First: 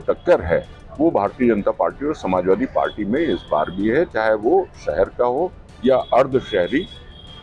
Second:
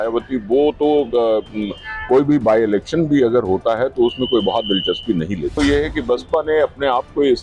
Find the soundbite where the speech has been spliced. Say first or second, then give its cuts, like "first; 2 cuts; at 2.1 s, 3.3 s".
second; 1 cut; at 5.5 s